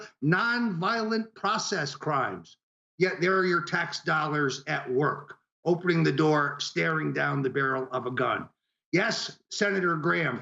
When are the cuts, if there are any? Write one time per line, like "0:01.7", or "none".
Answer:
none